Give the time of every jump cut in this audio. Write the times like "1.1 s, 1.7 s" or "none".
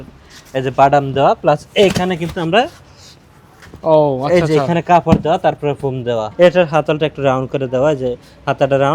6.3 s